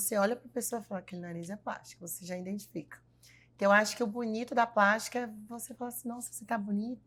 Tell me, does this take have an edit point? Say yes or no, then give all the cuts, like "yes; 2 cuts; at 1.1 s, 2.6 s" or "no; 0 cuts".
no; 0 cuts